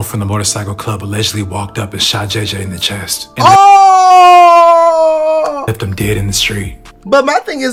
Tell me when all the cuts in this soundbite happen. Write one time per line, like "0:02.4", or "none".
none